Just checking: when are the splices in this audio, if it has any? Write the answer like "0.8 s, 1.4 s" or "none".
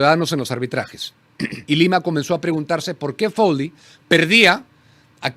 1.6 s

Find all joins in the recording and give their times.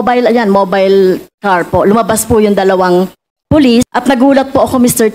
3.9 s

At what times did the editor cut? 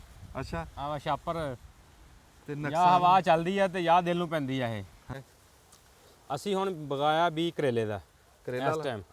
5.1 s

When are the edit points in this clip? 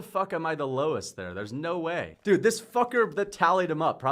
2.1 s

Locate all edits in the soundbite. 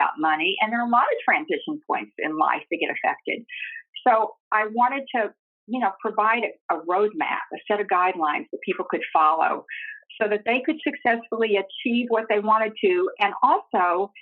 none

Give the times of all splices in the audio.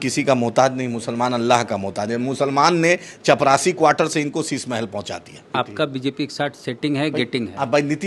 5.5 s

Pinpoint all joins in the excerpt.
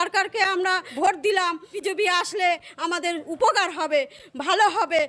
0.9 s, 1.7 s

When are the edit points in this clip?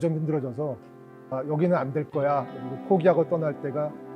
1.3 s

